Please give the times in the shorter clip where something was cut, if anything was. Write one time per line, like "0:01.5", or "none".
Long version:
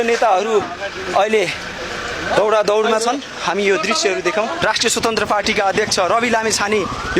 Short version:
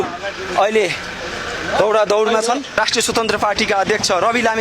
0:02.7

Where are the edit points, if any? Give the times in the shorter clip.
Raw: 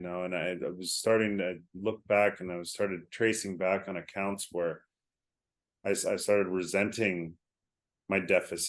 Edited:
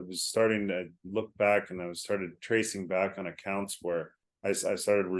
0:04.2

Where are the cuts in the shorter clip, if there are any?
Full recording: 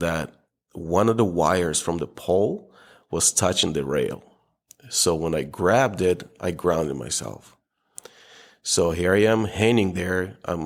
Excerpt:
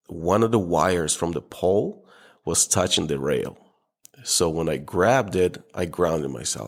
none

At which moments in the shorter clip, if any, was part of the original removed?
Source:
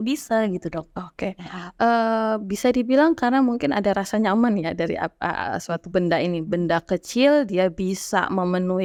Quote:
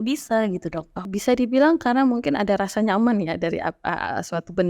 0:01.1

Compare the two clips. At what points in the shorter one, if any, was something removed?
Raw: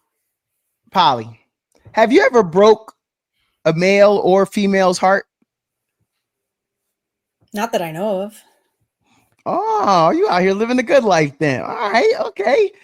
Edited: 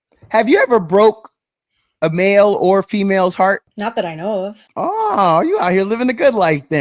0:03.7
0:04.6

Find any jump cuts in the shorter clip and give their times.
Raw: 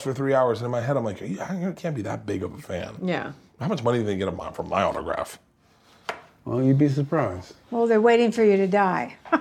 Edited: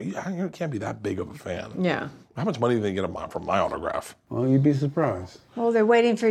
0:04.2

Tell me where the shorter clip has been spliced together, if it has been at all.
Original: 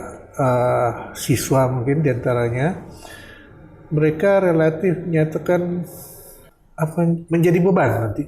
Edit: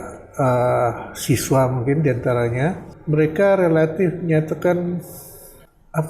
0:02.9

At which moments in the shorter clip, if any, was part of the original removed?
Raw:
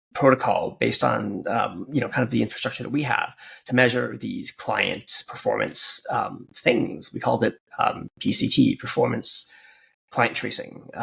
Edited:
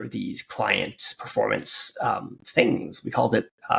none

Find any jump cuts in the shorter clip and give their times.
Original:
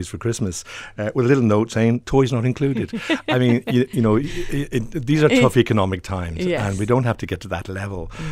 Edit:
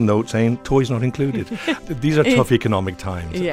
0:01.8

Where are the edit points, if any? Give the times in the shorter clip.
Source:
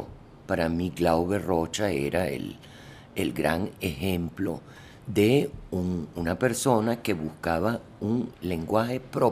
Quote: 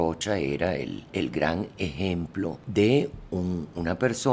0:01.0
0:02.6

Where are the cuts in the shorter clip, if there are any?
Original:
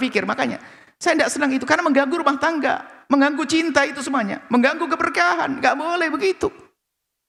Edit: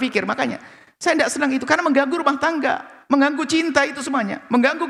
none

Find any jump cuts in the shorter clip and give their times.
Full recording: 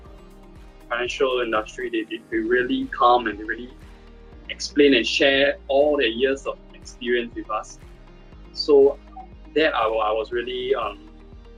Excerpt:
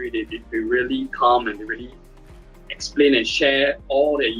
none

